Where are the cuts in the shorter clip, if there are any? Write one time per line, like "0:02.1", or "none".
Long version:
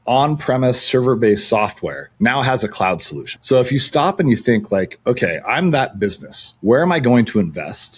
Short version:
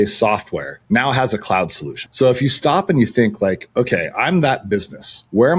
none